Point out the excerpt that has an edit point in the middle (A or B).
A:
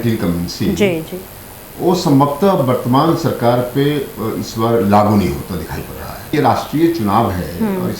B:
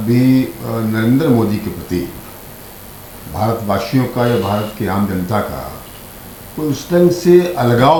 A